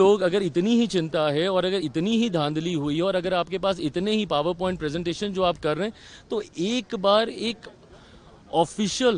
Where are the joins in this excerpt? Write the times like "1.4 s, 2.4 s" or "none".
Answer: none